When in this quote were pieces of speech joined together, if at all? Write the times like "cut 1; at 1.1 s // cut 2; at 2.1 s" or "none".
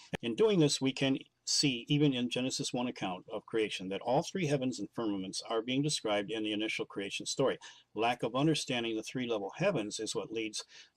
cut 1; at 8.2 s